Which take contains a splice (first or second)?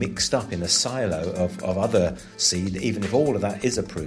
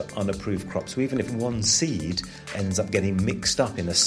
second